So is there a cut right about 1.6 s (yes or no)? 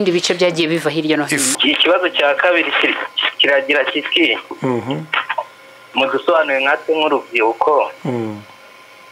yes